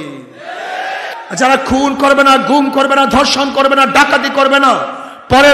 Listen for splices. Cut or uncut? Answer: cut